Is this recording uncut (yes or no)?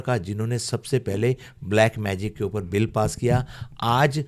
yes